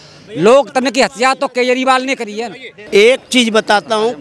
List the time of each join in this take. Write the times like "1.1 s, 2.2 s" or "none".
2.7 s